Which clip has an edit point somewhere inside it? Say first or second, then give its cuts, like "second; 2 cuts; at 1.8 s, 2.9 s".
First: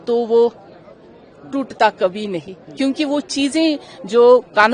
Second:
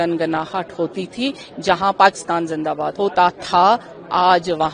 second; 1 cut; at 2.9 s